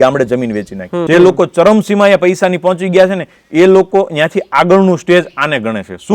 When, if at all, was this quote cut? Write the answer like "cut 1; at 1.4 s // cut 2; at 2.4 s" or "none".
cut 1; at 1.0 s

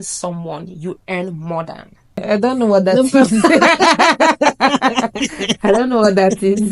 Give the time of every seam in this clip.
cut 1; at 2.2 s

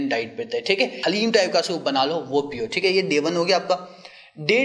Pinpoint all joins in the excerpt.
cut 1; at 1.0 s

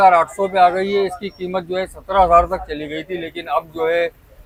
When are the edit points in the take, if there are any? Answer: none

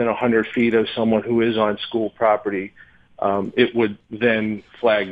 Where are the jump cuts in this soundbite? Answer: cut 1; at 4.0 s

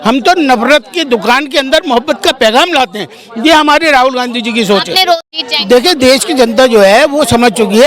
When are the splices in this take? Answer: cut 1; at 5.3 s

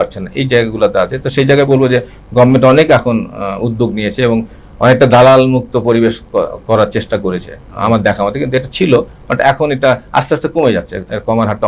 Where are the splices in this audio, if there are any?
none

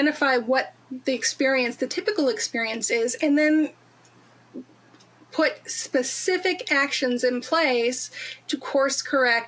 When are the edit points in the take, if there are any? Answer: none

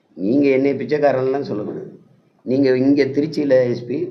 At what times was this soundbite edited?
none

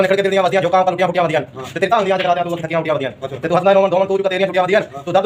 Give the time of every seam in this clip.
none

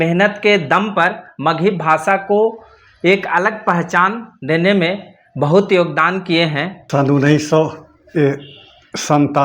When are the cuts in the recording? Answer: cut 1; at 6.8 s

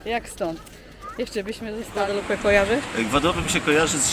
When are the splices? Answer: cut 1; at 1.9 s

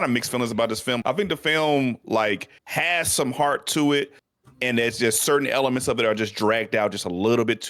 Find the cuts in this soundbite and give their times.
cut 1; at 1.0 s // cut 2; at 2.6 s

